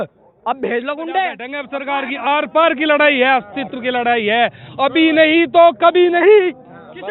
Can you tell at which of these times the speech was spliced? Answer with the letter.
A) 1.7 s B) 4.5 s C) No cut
A